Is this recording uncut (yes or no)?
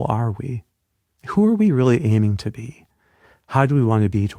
yes